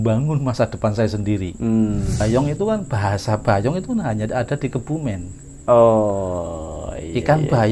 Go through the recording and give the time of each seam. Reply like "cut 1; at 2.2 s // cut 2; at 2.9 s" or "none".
cut 1; at 2.2 s

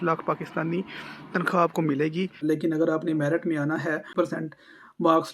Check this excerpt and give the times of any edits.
cut 1; at 2.4 s // cut 2; at 4.1 s

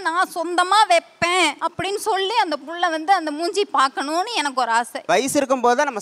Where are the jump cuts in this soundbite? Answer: cut 1; at 1.6 s // cut 2; at 5.0 s

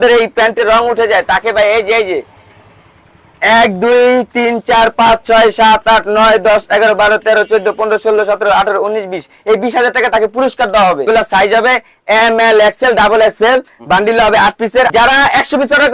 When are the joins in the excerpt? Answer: cut 1; at 11.1 s // cut 2; at 14.9 s

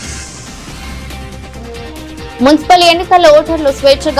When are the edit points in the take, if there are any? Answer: cut 1; at 2.4 s

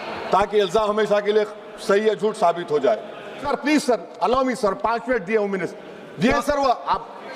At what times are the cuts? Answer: cut 1; at 3.5 s

